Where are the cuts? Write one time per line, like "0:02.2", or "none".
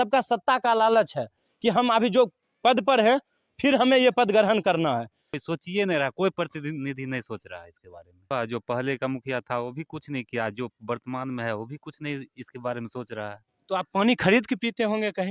0:05.3
0:08.3